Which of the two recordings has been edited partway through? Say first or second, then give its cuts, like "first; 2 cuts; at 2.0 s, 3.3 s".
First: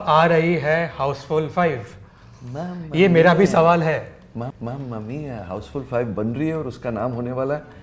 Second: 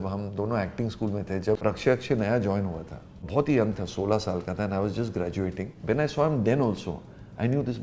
second; 3 cuts; at 1.6 s, 3.1 s, 5.8 s